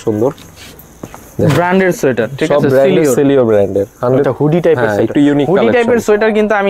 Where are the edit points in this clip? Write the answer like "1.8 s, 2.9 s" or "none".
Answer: 4.3 s

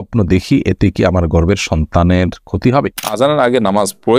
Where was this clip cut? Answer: 3.0 s

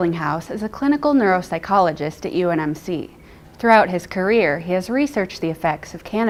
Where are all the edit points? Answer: none

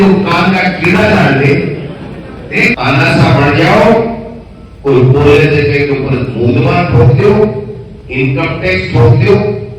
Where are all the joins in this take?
2.7 s

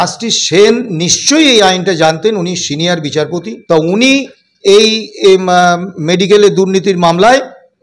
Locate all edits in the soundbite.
3.5 s

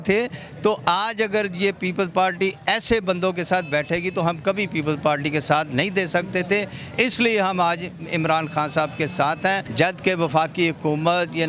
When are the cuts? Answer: 9.7 s

